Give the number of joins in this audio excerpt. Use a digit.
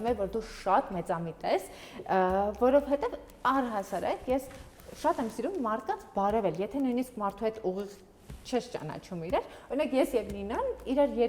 0